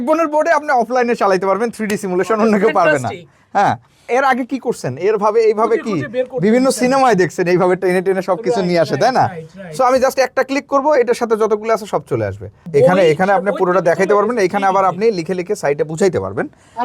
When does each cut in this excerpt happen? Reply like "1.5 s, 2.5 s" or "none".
4.1 s, 12.5 s